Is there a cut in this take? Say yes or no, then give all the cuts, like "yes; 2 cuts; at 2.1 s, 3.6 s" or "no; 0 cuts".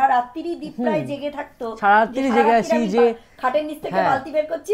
no; 0 cuts